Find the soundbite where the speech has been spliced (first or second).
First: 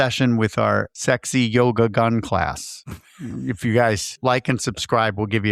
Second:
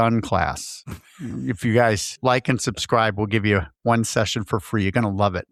first